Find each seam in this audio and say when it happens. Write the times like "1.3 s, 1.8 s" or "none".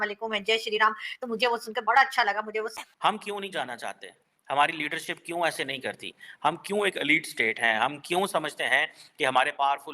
2.8 s